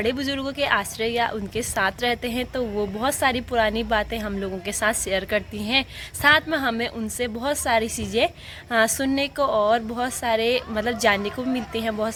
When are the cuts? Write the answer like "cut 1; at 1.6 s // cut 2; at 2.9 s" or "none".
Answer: none